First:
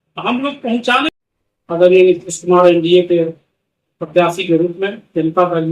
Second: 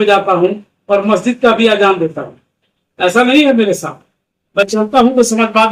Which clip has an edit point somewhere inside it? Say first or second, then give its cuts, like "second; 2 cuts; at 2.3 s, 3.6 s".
first; 1 cut; at 1.1 s